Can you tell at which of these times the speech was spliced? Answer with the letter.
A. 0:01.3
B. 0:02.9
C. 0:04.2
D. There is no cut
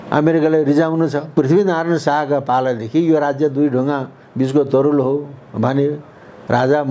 A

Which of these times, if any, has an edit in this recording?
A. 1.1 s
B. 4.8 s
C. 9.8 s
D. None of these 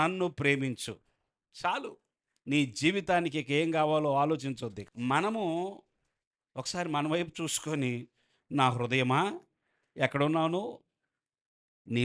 B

